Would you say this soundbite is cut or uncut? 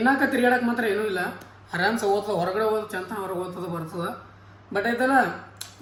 uncut